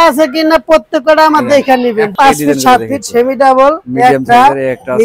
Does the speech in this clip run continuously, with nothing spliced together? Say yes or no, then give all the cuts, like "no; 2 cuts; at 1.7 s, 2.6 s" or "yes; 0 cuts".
no; 1 cut; at 2.1 s